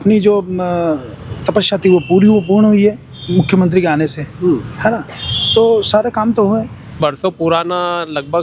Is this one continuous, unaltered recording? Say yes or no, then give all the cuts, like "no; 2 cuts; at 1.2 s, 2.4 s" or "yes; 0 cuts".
no; 1 cut; at 7.0 s